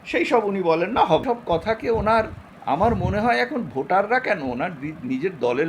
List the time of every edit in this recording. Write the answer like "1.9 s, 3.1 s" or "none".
1.2 s